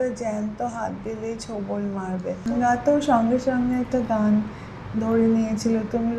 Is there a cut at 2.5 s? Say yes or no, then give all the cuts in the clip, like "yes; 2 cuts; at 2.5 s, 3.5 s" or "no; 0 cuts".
yes; 1 cut; at 2.5 s